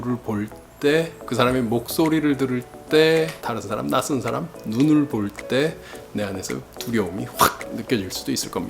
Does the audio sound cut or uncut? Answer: cut